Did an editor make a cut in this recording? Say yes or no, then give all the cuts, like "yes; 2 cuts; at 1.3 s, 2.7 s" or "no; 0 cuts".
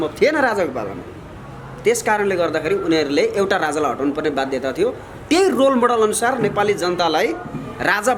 no; 0 cuts